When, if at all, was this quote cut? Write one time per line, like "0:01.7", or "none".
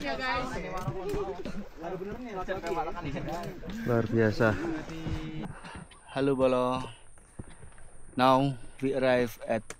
0:05.4